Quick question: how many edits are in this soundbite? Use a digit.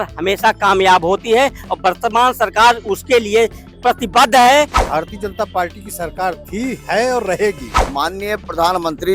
2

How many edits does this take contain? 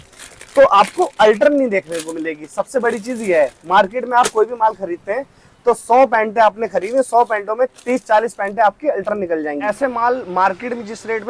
1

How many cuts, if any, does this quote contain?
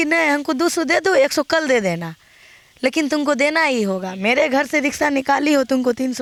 0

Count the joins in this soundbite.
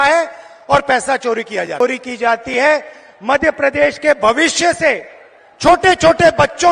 1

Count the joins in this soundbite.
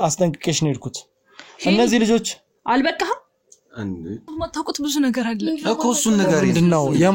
1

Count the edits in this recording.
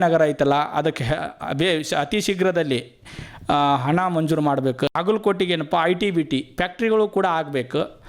1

